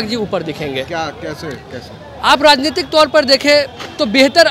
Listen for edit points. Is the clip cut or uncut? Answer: uncut